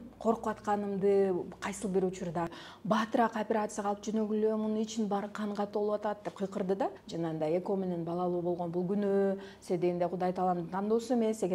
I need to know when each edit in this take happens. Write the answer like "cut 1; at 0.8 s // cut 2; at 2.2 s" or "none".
cut 1; at 2.5 s // cut 2; at 7.0 s